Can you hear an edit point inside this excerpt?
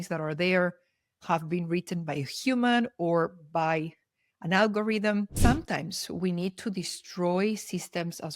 yes; 1 cut; at 5.3 s

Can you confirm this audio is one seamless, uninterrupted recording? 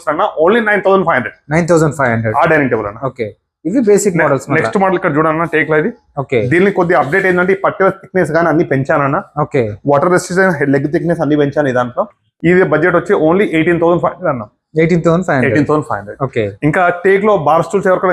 yes; 0 cuts

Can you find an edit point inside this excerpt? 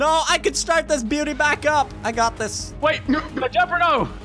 no; 0 cuts

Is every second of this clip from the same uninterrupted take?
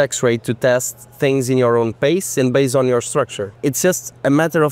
no; 1 cut; at 3.6 s

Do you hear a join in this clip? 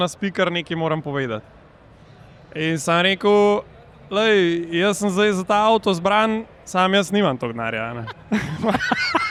no; 0 cuts

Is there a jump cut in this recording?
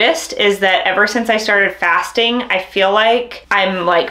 no; 0 cuts

